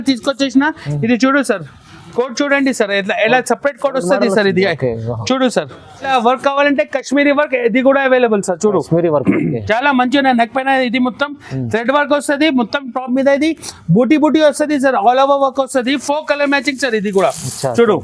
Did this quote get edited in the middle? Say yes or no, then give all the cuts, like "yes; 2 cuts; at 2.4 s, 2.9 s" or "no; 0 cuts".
yes; 1 cut; at 6.1 s